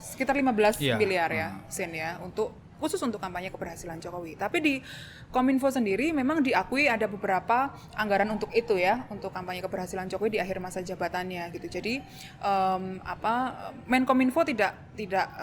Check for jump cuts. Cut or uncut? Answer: uncut